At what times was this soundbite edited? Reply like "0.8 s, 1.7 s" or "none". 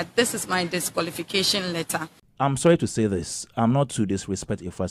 2.2 s